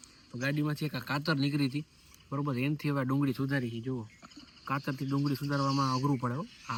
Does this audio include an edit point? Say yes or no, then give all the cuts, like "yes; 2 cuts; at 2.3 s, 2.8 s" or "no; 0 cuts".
no; 0 cuts